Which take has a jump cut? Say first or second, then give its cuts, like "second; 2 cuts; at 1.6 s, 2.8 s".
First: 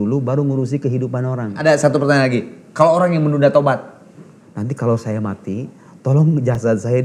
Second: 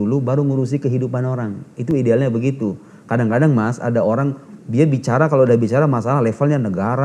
first; 2 cuts; at 1.6 s, 4.3 s